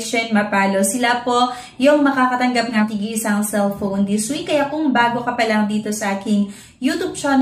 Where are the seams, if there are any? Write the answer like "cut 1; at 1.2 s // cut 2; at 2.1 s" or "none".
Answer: cut 1; at 2.8 s